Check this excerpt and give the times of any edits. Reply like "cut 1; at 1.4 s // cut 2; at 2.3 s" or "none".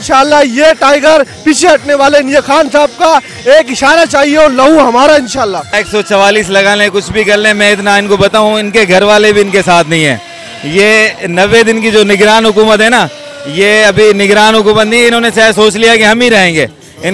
cut 1; at 5.7 s